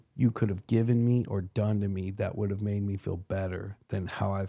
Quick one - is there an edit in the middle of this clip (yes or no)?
no